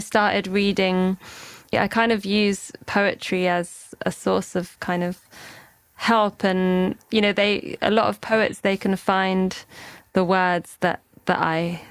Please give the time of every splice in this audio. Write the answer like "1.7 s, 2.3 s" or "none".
1.7 s, 3.9 s

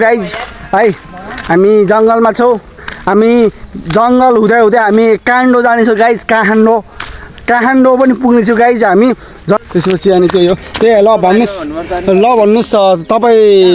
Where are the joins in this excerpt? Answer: 9.6 s

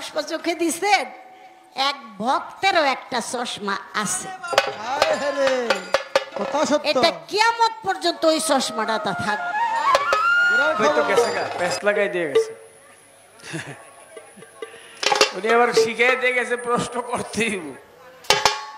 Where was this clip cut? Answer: 11.3 s

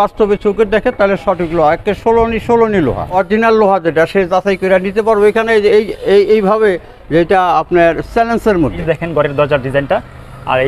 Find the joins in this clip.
3.1 s, 8.8 s

